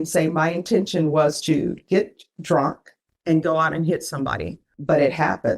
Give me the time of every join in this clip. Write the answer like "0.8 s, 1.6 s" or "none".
4.6 s

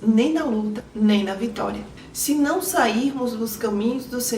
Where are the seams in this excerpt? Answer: 1.9 s

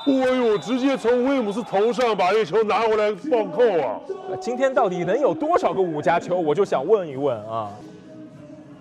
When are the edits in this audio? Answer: 7.8 s

